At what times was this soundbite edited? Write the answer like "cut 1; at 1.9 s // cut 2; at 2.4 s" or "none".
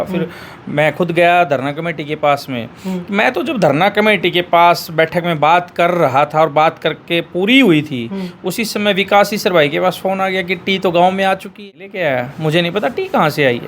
cut 1; at 11.6 s